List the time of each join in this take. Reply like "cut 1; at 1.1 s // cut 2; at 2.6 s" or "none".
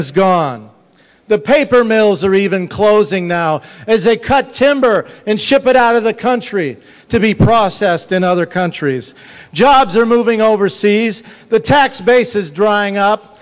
cut 1; at 7.5 s